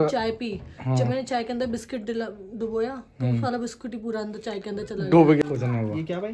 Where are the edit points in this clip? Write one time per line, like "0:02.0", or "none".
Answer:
0:05.4